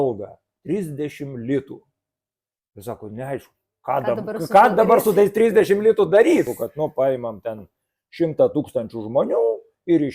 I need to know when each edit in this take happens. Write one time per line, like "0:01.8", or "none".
0:06.5

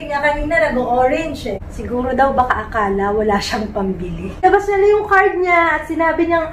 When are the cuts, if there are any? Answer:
0:01.6
0:04.4

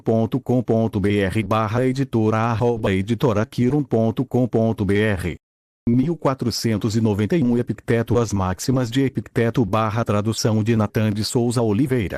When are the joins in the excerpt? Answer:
none

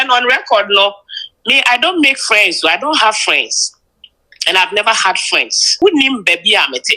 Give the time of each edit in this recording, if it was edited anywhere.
0:05.7

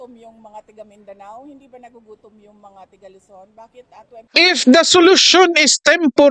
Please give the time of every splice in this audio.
0:04.3

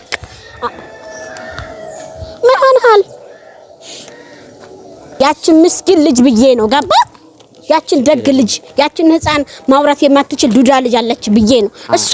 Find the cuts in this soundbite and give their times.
0:05.1

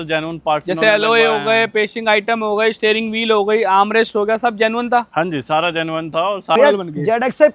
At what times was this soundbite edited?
0:06.6

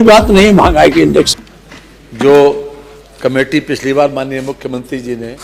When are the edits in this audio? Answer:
0:01.4

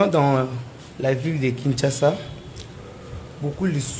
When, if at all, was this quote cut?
none

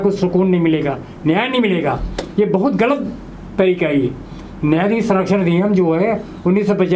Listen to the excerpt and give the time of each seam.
none

